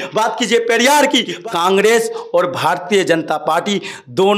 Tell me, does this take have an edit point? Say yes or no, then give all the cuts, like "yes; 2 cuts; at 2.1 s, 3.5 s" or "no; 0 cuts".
yes; 1 cut; at 1.3 s